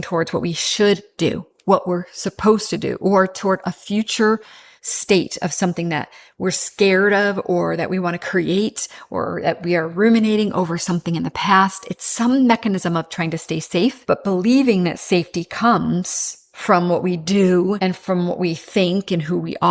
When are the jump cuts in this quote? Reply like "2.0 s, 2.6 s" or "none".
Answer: 14.0 s, 17.8 s